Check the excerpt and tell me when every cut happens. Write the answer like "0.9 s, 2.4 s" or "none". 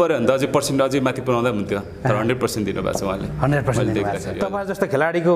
4.4 s